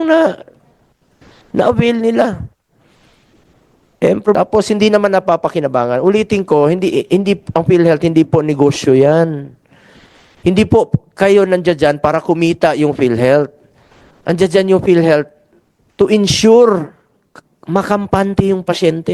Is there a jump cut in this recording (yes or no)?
yes